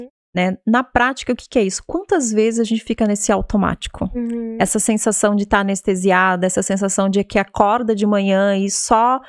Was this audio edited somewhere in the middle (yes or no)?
no